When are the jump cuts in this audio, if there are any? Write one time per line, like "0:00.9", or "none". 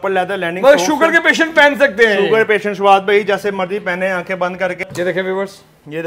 0:04.8